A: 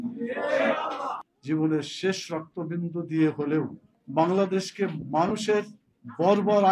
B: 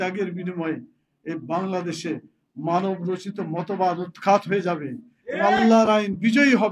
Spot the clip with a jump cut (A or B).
A